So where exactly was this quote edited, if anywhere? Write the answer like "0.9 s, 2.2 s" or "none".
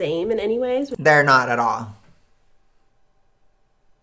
none